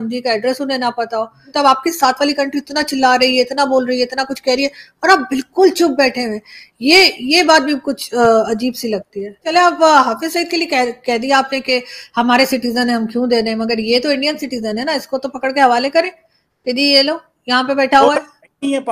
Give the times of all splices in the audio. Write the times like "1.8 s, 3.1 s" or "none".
1.4 s, 9.5 s